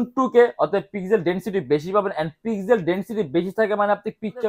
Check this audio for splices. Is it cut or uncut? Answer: uncut